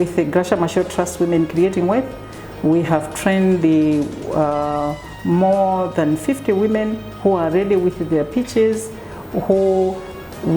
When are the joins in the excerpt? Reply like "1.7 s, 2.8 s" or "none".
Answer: none

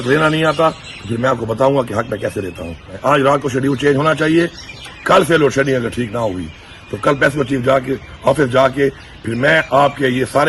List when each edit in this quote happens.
2.9 s

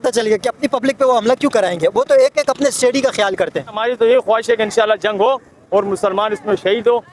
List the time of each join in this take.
3.8 s

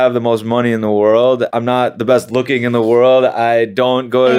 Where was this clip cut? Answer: 1.5 s

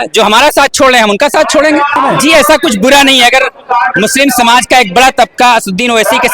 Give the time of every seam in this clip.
2.0 s

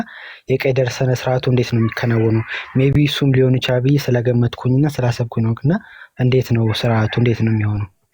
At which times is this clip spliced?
none

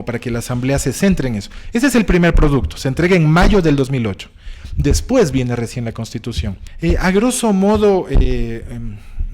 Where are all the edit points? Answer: 6.6 s

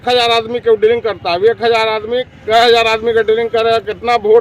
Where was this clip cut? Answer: none

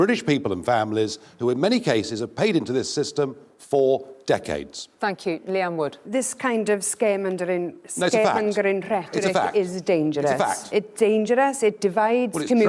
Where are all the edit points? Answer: 4.8 s

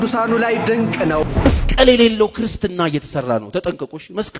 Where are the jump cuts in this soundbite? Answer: 1.2 s

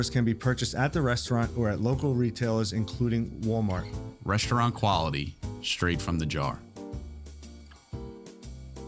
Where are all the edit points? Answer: none

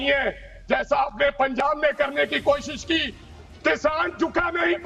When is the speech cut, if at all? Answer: none

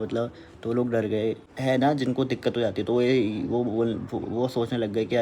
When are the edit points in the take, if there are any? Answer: 1.5 s

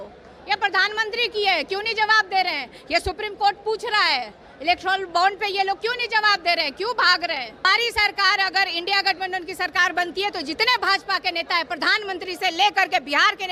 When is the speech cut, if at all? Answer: 7.7 s

